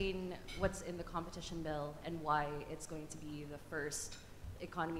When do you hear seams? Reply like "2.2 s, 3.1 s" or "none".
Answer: none